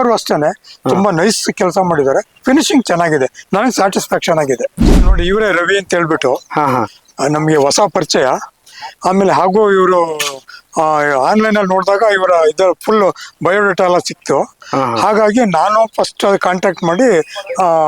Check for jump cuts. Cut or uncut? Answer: cut